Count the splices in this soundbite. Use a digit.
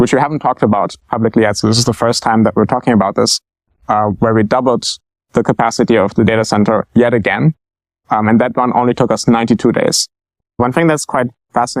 1